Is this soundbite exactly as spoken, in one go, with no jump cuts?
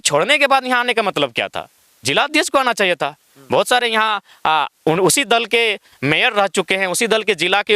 yes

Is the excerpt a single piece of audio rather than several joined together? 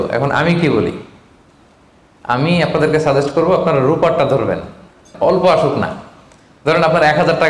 no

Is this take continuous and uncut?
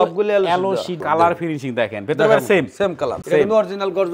no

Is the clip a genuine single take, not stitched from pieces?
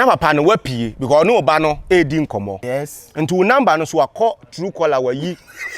no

